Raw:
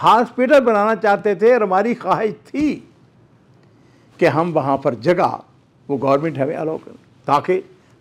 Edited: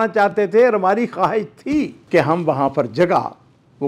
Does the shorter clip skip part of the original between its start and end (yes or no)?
yes